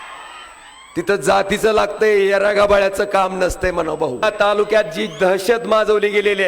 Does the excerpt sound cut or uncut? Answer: cut